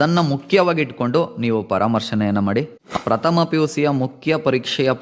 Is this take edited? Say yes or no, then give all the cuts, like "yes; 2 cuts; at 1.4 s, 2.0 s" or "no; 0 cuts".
yes; 1 cut; at 2.9 s